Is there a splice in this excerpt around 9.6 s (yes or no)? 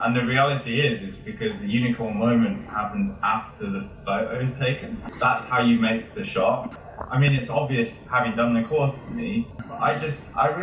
yes